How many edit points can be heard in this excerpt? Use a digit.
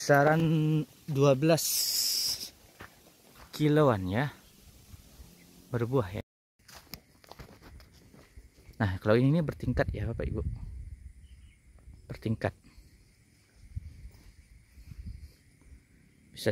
1